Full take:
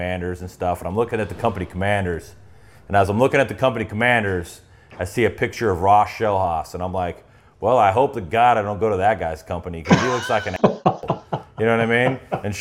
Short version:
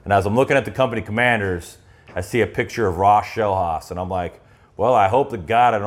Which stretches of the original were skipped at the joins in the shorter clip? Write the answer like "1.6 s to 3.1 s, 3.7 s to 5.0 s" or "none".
none